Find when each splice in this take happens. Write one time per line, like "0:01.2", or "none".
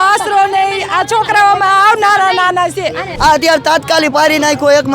0:03.1